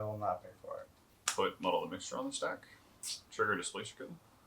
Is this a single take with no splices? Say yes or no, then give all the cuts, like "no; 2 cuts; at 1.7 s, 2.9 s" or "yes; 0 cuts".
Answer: no; 1 cut; at 1.1 s